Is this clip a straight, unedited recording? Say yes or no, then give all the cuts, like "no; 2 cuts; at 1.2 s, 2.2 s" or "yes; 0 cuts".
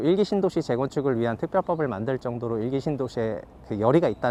yes; 0 cuts